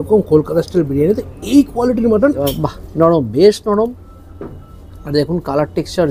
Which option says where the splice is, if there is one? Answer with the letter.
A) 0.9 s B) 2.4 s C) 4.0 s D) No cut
B